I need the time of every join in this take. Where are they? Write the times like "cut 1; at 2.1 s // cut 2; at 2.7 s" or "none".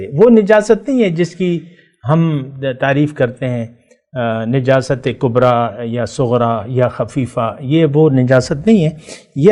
none

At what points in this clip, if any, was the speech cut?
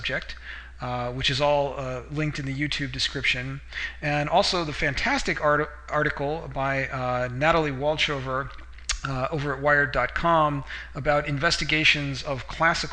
none

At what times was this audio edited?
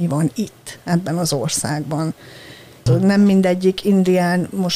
cut 1; at 2.8 s

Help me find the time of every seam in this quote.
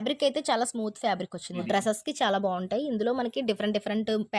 cut 1; at 1.6 s

